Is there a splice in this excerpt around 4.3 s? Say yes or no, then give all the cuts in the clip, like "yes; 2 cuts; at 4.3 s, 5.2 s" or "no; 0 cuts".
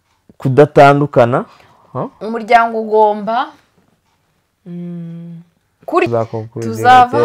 no; 1 cut; at 6.1 s